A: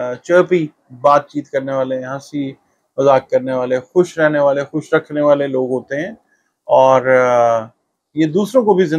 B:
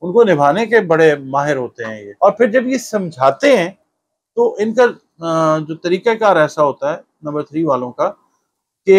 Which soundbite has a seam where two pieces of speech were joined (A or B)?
B